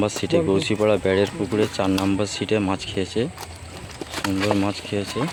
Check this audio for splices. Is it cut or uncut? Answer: uncut